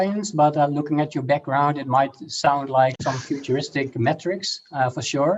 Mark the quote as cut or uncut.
uncut